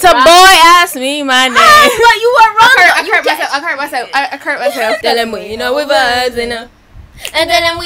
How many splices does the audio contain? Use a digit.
1